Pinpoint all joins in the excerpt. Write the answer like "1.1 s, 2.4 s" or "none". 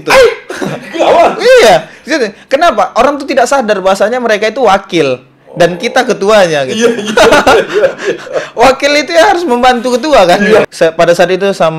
10.7 s